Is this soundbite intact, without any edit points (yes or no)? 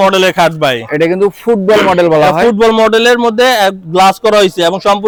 yes